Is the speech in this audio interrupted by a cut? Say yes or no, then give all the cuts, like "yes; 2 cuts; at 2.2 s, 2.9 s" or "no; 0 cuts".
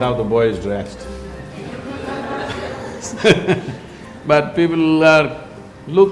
no; 0 cuts